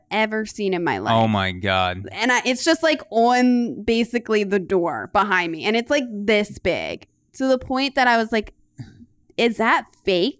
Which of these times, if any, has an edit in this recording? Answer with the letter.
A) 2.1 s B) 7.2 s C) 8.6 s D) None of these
D